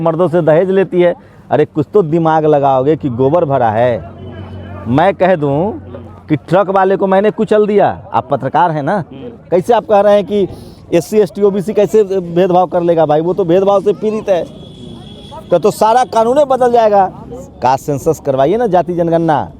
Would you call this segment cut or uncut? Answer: cut